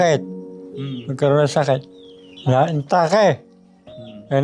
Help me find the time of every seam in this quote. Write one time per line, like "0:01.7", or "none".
0:02.3